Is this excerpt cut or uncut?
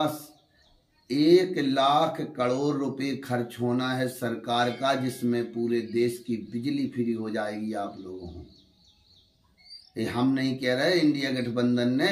uncut